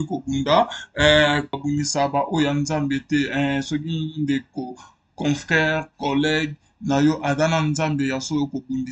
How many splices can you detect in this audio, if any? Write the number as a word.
one